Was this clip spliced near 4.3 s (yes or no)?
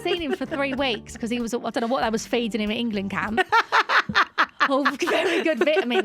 no